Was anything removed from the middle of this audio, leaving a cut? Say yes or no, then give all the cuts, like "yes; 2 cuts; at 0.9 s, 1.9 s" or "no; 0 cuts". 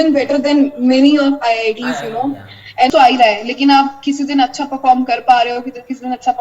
yes; 1 cut; at 2.9 s